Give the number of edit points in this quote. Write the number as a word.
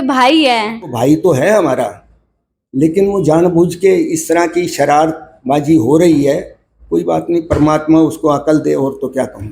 one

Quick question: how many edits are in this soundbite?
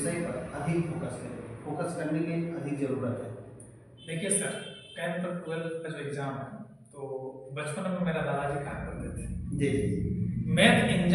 zero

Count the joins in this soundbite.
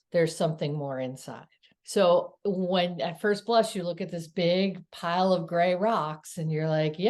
one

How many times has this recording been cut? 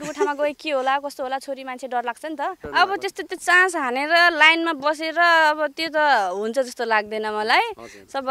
one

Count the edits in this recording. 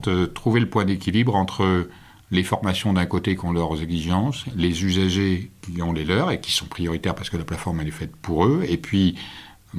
zero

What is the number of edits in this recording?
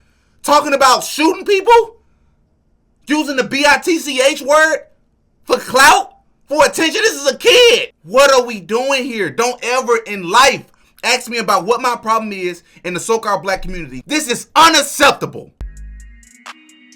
three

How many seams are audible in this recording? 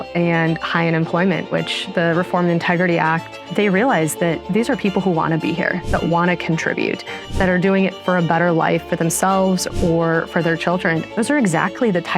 two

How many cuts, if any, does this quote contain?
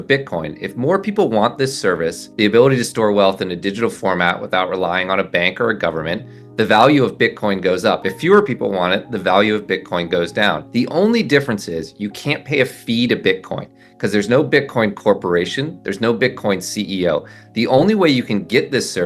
two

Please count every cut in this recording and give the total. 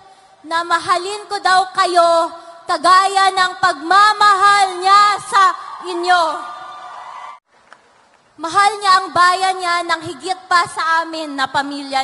one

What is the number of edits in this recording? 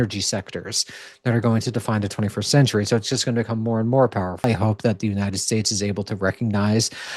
one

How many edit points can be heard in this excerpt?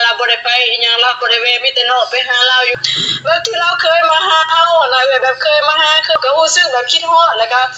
two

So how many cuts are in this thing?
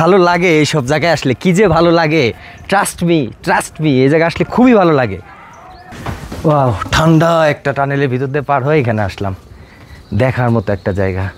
one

